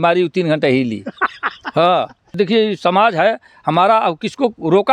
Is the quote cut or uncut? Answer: cut